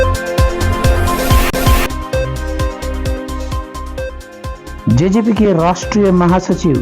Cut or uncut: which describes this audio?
cut